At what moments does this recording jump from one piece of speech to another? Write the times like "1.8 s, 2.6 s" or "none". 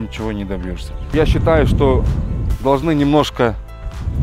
0.9 s